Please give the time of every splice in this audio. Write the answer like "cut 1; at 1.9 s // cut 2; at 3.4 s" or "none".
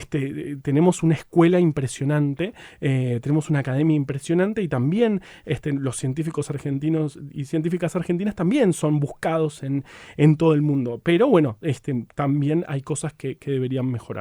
none